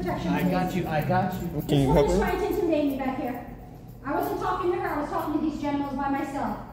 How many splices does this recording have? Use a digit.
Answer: 0